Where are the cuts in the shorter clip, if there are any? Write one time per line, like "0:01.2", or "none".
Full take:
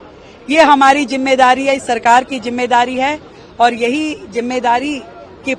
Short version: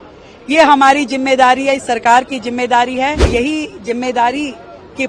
0:03.3